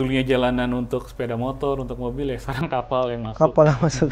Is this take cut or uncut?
uncut